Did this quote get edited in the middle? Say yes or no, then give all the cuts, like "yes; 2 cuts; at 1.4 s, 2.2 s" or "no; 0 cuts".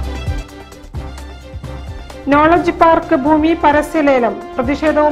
yes; 1 cut; at 1.8 s